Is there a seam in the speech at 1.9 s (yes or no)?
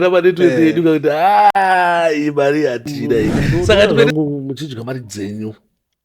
no